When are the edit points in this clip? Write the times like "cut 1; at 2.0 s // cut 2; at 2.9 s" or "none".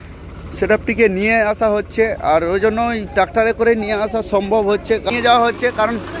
cut 1; at 5.1 s